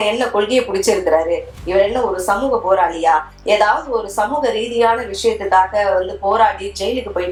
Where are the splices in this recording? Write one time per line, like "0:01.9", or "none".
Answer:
none